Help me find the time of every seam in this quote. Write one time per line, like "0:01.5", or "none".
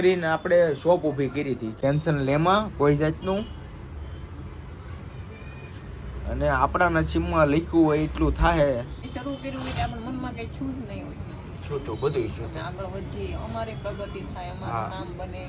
0:01.7
0:09.0